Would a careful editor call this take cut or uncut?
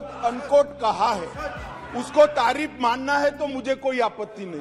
uncut